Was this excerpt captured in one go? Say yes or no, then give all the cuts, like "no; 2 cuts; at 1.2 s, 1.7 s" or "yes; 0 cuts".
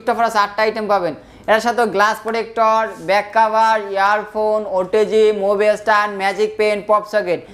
yes; 0 cuts